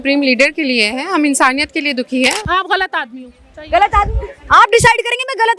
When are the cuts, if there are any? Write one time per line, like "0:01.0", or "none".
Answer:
0:02.4

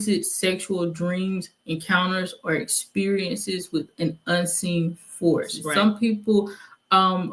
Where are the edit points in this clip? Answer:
0:05.7

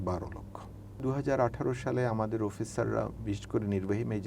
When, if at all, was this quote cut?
0:01.0

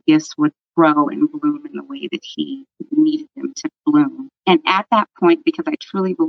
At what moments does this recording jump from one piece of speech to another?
0:04.3

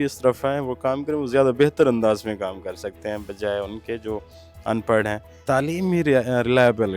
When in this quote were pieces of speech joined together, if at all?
0:05.3

